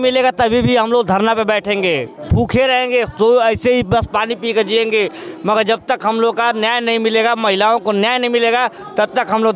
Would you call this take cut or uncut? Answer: uncut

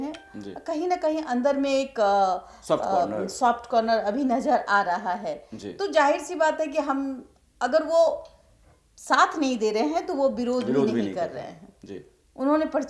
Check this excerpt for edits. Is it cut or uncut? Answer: uncut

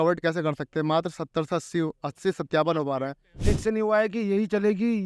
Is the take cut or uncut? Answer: cut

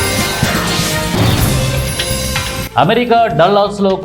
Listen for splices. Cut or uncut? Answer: cut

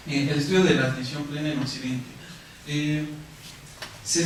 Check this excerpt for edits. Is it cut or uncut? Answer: uncut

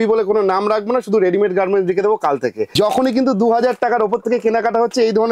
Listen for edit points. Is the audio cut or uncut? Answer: cut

